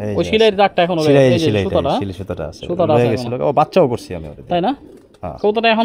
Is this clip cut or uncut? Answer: uncut